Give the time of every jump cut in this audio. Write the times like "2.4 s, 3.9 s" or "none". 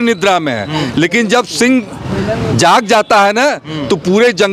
none